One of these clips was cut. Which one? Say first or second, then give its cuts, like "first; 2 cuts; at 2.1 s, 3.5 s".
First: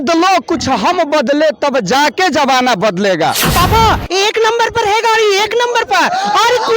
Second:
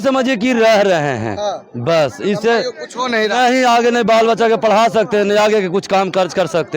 first; 1 cut; at 3.4 s